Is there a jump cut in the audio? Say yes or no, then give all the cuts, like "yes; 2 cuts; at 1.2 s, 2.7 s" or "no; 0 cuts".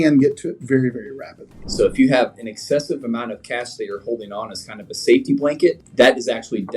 yes; 2 cuts; at 1.6 s, 5.8 s